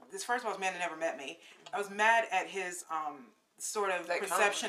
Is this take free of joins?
yes; 0 cuts

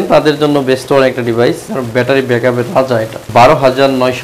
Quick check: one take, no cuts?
no; 2 cuts; at 1.6 s, 3.2 s

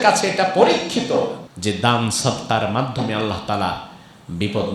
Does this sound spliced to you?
yes; 1 cut; at 1.5 s

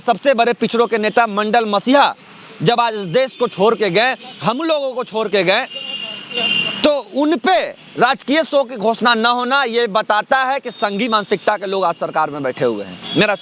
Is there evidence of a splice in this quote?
no; 0 cuts

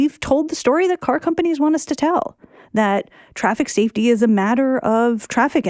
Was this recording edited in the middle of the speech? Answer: no; 0 cuts

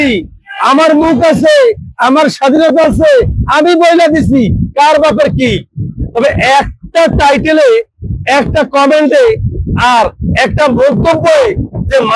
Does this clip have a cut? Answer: no; 0 cuts

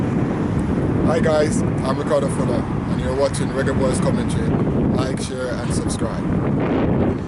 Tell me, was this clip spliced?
no; 0 cuts

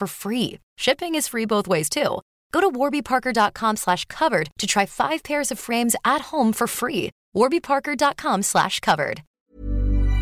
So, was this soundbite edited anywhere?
yes; 1 cut; at 9.3 s

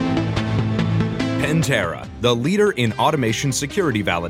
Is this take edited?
yes; 1 cut; at 1.4 s

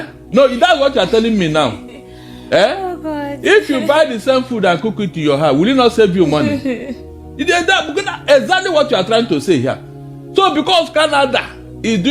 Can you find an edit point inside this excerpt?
no; 0 cuts

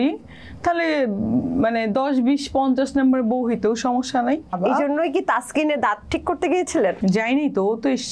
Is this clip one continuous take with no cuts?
no; 2 cuts; at 4.6 s, 7.0 s

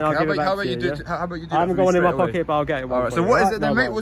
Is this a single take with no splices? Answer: yes; 0 cuts

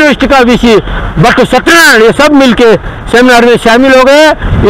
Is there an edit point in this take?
no; 0 cuts

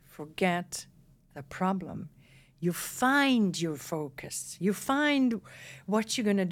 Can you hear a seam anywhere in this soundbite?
no; 0 cuts

